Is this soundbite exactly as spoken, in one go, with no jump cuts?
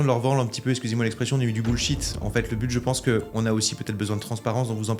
yes; 0 cuts

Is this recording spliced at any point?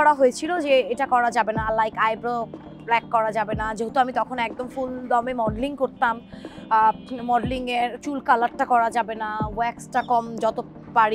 no; 0 cuts

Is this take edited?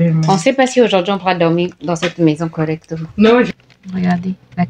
yes; 1 cut; at 3.5 s

